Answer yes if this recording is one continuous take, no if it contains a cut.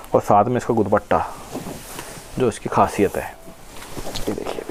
yes